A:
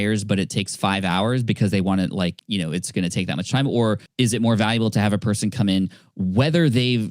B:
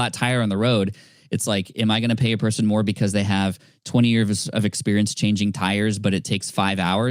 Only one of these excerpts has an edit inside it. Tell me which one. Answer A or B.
A